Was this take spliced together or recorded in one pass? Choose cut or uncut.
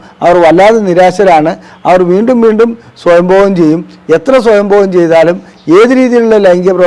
uncut